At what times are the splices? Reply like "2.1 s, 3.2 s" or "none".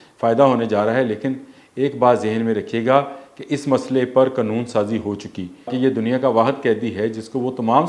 5.7 s